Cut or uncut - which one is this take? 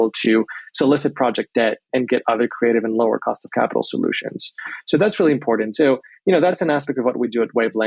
cut